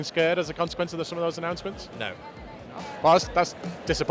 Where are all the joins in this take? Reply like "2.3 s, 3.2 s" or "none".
2.8 s